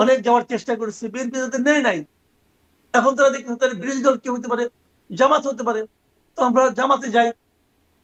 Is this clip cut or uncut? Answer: uncut